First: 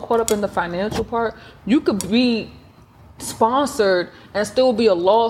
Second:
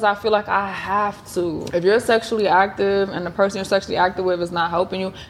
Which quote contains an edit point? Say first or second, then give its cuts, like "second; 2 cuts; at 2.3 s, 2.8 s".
second; 1 cut; at 1.6 s